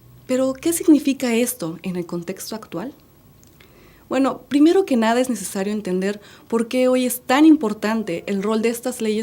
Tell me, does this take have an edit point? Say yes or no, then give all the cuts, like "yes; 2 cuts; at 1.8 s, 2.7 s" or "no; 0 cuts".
yes; 1 cut; at 7.1 s